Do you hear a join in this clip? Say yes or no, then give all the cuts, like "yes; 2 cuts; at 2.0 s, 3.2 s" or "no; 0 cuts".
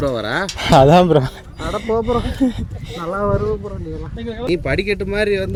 no; 0 cuts